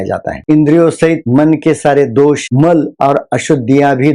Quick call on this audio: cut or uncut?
cut